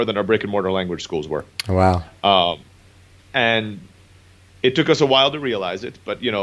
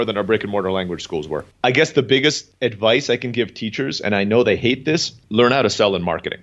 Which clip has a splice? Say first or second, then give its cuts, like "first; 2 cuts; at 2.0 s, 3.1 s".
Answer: second; 3 cuts; at 1.4 s, 2.5 s, 5.2 s